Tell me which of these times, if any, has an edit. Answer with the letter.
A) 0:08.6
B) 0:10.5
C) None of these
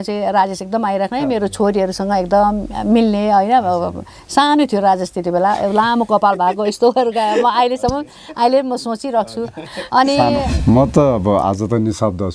B